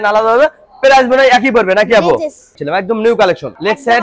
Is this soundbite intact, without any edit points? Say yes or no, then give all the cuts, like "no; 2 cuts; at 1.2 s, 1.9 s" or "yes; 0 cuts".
no; 1 cut; at 2.5 s